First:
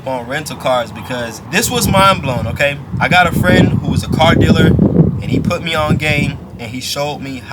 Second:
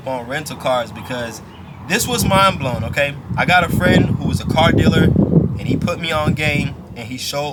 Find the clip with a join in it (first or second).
first